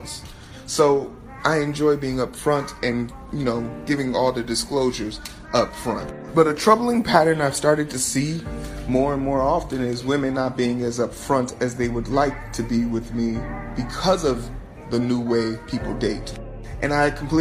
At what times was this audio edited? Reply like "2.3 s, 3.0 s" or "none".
none